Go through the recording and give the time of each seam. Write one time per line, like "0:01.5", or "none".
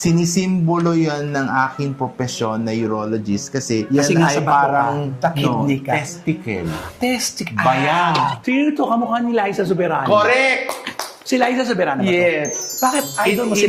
0:08.4
0:11.1